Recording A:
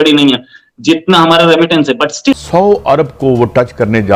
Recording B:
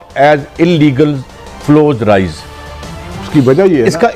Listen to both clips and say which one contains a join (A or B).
A